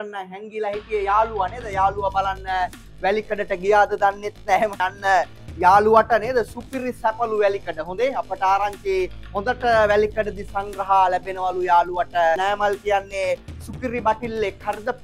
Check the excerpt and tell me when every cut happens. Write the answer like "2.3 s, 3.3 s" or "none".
4.8 s, 12.4 s

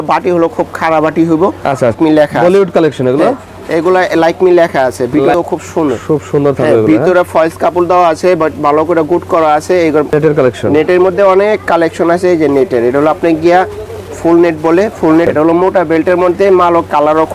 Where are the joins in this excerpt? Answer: 2.0 s, 5.3 s, 10.1 s, 15.3 s

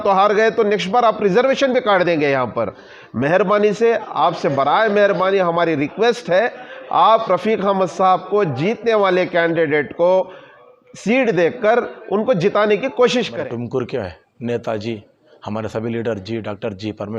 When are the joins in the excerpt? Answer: 13.3 s

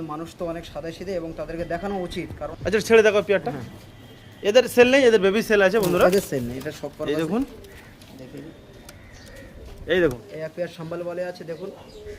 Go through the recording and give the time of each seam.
2.4 s, 10.3 s

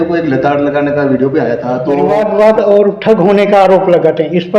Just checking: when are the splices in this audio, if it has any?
2.2 s

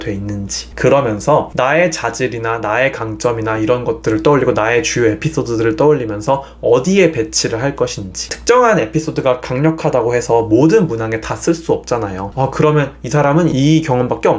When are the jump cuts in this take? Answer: 12.2 s

